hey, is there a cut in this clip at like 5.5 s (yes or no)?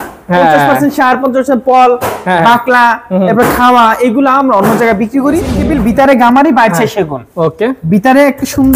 yes